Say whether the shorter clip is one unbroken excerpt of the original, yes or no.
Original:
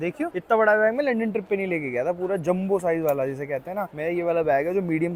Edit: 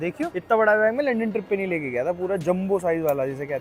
yes